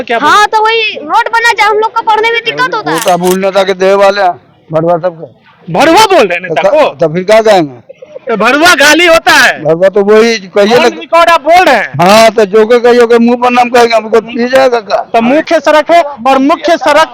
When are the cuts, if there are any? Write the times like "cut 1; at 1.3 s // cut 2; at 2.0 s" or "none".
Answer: cut 1; at 2.8 s // cut 2; at 15.4 s